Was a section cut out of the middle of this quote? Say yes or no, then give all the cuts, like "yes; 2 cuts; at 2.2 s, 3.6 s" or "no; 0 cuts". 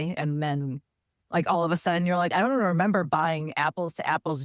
no; 0 cuts